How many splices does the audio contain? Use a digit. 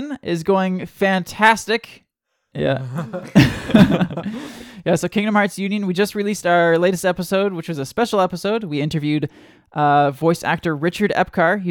1